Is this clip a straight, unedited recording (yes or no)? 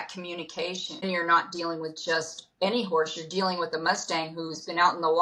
no